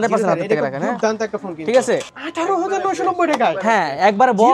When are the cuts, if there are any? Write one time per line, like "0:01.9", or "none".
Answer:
0:02.2